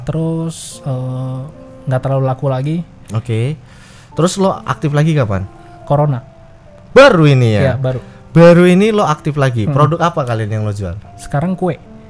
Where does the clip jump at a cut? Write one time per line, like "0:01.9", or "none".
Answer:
none